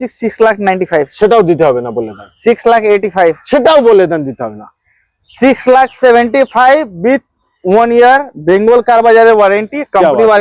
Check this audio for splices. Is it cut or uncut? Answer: uncut